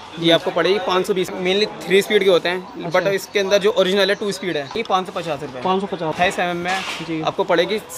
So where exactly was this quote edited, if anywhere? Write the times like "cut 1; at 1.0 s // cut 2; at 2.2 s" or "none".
cut 1; at 1.3 s // cut 2; at 4.8 s // cut 3; at 6.1 s

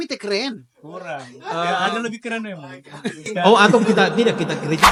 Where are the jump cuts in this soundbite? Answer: none

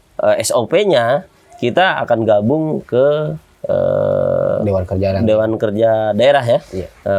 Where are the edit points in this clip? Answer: none

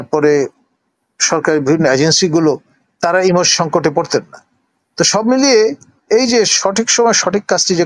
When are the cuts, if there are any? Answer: none

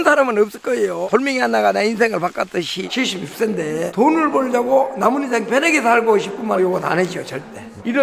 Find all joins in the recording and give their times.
cut 1; at 1.1 s // cut 2; at 2.9 s

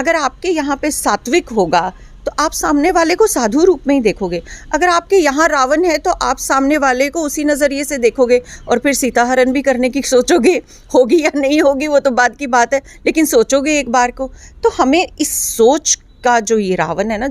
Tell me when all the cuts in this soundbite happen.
none

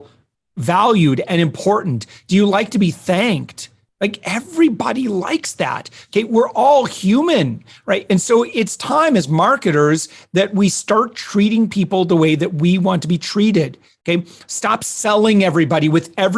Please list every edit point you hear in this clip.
none

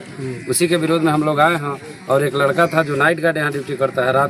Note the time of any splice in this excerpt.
none

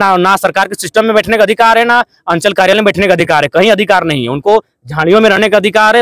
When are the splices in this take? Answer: none

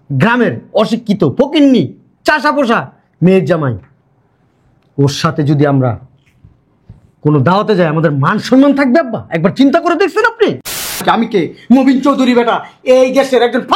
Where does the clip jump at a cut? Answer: cut 1; at 11.0 s

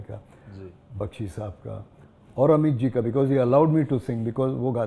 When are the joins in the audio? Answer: none

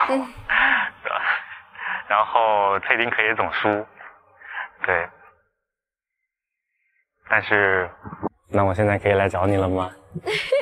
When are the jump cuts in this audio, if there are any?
cut 1; at 8.4 s

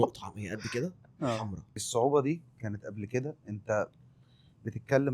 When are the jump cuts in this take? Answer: cut 1; at 1.7 s

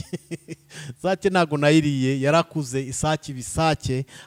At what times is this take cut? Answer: none

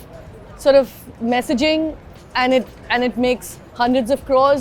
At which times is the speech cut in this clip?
none

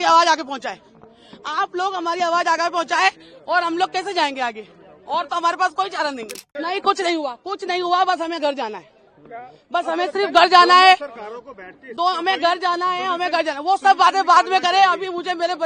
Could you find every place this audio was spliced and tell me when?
cut 1; at 6.4 s

